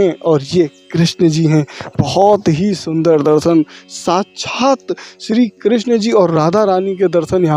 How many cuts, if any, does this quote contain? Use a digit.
0